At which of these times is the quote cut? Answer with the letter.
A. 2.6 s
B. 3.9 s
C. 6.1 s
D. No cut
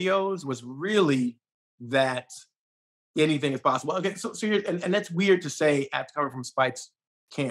D